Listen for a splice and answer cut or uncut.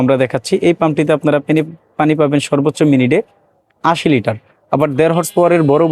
uncut